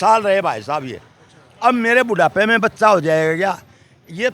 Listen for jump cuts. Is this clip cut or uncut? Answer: uncut